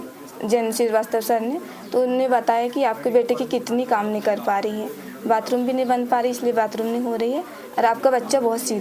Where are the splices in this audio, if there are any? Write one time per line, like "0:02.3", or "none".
none